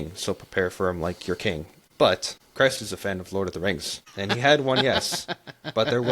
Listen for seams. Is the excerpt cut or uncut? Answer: cut